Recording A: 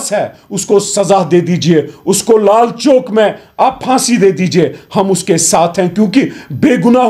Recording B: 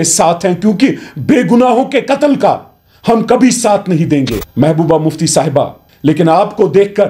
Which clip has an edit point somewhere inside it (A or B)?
B